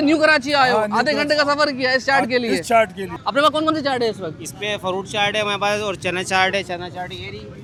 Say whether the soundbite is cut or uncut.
uncut